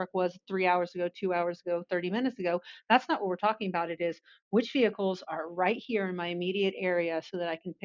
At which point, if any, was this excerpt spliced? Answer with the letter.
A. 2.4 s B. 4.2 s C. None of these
C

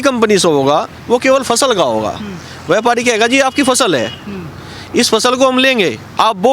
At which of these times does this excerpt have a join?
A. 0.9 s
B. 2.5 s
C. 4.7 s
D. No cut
D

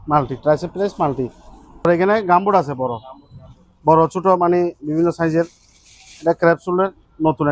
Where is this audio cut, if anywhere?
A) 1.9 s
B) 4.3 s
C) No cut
A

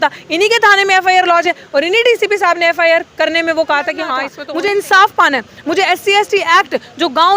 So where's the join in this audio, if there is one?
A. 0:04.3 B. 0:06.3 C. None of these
A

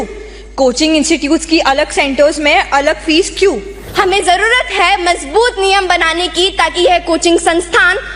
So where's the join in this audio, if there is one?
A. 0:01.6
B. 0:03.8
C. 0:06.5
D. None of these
B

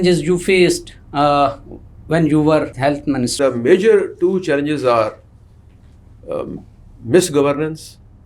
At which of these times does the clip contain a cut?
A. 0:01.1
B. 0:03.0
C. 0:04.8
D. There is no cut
B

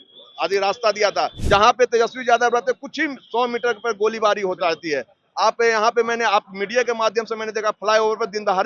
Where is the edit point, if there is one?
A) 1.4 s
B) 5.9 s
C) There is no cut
A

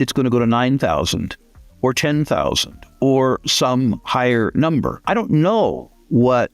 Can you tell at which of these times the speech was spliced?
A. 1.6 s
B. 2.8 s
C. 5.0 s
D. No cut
C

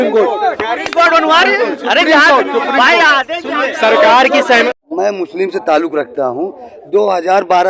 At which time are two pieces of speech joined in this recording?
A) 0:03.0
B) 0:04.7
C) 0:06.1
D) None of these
B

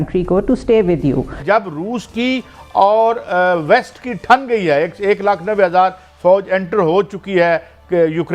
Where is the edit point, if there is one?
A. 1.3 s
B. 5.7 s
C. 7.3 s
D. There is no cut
A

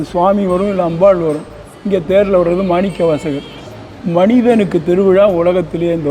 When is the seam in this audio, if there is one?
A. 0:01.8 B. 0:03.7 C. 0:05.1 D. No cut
B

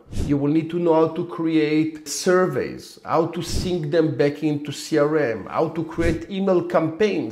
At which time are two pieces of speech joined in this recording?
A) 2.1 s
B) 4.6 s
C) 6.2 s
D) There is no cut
A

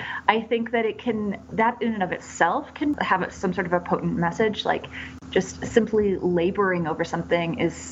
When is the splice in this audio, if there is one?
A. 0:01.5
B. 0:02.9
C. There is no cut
B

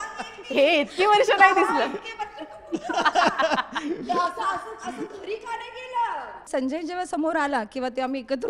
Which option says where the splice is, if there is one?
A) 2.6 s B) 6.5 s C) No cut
B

